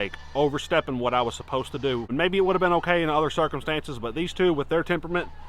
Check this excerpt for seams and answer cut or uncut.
cut